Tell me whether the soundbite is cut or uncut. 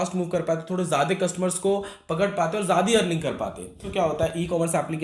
cut